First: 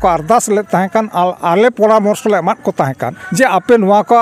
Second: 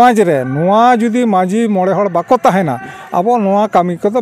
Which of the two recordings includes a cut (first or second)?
first